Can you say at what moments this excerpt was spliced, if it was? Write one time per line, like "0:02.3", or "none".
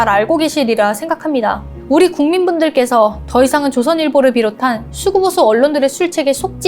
0:01.7